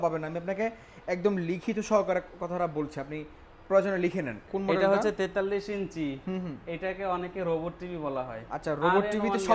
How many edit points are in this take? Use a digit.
1